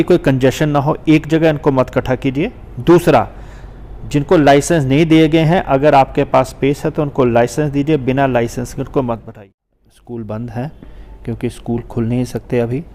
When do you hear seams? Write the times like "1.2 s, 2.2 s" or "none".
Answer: 9.3 s